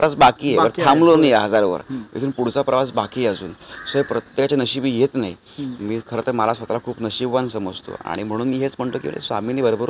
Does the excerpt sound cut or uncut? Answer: uncut